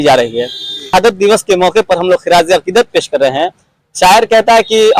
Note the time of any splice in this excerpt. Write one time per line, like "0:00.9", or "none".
0:00.9